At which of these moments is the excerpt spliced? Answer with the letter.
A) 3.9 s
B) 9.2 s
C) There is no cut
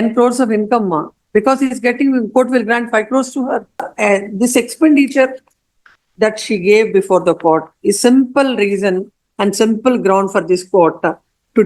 A